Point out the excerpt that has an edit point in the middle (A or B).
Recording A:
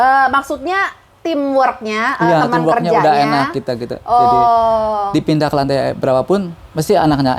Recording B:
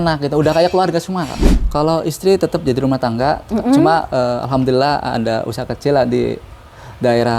B